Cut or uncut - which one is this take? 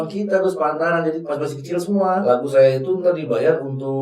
cut